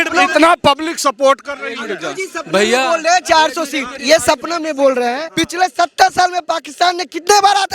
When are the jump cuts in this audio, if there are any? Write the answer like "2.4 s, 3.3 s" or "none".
5.3 s